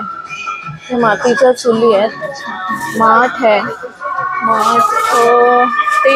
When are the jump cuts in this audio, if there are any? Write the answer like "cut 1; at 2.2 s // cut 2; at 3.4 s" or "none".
none